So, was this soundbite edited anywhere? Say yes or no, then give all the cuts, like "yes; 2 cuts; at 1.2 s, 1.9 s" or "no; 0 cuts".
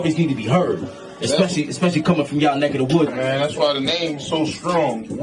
yes; 1 cut; at 3.1 s